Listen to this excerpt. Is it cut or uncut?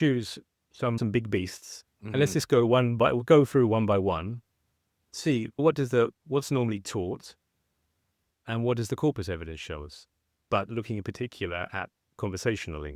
cut